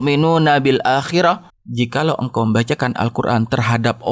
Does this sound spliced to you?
yes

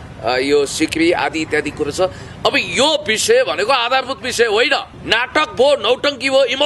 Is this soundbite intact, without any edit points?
no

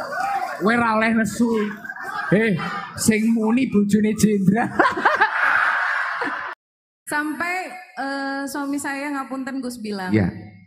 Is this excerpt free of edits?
no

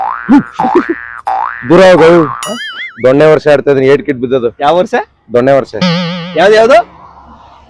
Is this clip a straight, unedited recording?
yes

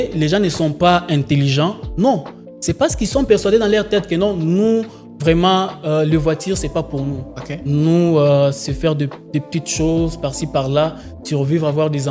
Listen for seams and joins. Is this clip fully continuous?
yes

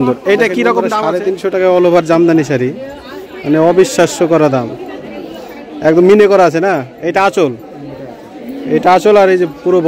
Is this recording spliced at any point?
yes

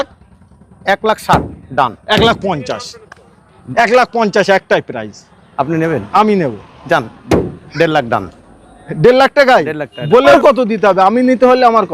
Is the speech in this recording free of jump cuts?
no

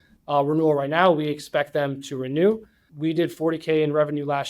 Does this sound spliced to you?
yes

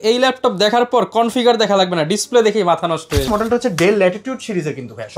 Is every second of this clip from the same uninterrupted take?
no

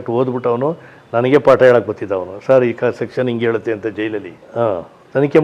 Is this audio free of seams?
no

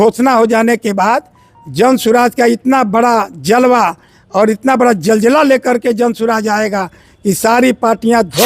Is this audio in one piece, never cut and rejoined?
yes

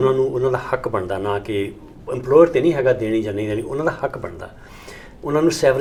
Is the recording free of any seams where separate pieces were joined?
yes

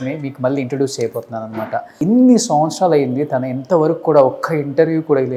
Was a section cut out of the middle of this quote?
yes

